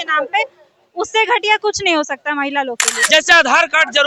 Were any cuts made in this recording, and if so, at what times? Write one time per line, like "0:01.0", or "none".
0:02.9